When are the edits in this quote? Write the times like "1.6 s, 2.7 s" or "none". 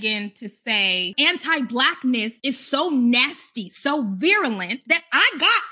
1.1 s, 2.3 s, 4.8 s